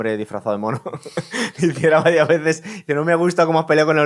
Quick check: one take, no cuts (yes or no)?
yes